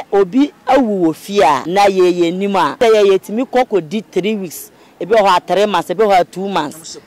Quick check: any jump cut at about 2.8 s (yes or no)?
yes